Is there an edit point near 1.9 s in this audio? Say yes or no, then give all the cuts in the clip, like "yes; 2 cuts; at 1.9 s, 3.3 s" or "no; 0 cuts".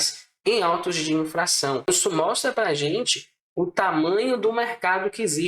yes; 1 cut; at 1.9 s